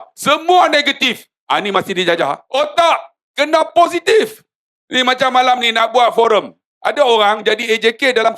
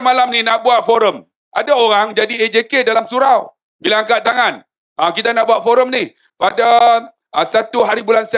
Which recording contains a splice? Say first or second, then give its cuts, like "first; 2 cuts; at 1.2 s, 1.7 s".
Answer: first; 1 cut; at 2.4 s